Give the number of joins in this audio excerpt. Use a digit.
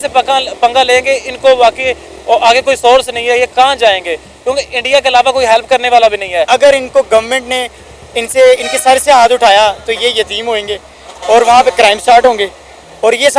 1